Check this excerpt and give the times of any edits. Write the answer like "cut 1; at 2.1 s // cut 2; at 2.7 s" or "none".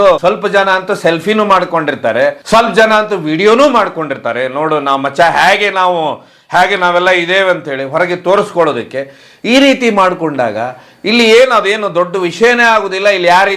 none